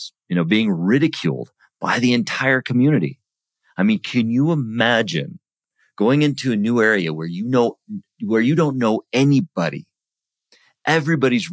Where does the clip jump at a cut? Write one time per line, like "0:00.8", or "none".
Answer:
none